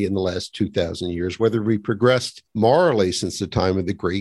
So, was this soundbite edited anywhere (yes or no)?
yes